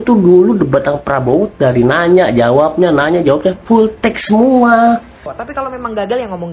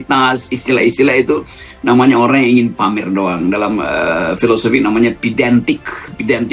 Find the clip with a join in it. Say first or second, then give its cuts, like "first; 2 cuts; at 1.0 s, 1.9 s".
first; 1 cut; at 5.2 s